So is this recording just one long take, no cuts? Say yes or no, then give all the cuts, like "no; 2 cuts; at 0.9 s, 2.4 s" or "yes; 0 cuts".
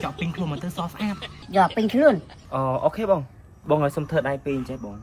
no; 1 cut; at 1.3 s